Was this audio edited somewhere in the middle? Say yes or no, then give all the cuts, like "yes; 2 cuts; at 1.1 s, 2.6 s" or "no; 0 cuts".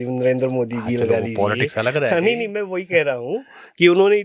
no; 0 cuts